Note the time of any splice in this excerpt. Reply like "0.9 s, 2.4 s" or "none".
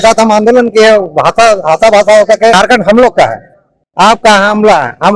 2.6 s